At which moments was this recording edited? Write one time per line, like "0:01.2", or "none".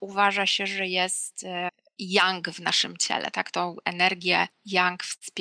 0:01.8